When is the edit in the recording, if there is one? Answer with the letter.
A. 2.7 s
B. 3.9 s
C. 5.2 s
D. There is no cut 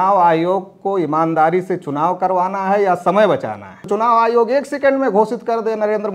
B